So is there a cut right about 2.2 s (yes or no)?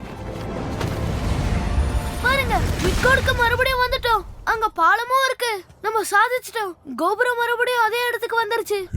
yes